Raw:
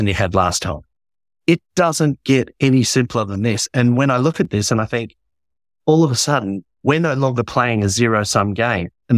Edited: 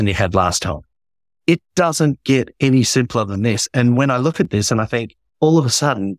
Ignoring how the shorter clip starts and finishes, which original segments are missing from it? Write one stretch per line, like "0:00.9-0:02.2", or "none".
0:05.2-0:05.7